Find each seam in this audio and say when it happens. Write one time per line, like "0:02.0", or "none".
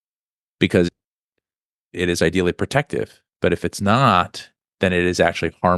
none